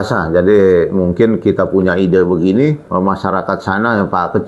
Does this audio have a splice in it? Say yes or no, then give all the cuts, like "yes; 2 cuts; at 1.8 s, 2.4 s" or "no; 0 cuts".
yes; 1 cut; at 2.8 s